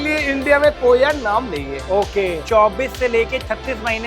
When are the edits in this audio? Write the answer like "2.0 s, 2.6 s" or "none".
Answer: 2.4 s